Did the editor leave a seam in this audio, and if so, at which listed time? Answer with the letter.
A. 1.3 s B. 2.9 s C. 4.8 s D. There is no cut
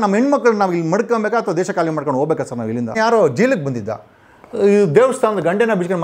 B